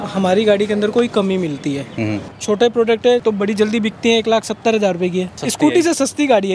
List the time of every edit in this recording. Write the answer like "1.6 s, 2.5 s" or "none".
2.2 s, 3.2 s, 5.4 s